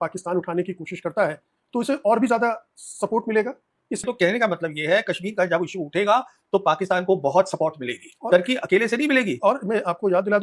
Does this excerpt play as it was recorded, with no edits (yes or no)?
no